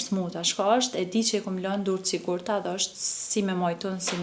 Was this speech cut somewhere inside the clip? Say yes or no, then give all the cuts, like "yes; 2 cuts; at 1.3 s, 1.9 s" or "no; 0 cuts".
no; 0 cuts